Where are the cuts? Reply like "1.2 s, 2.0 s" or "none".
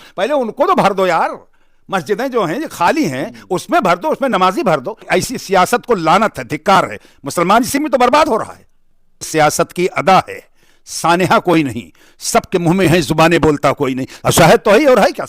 5.0 s, 9.3 s